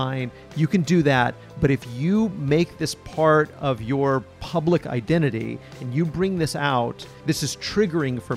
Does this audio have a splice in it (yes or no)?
yes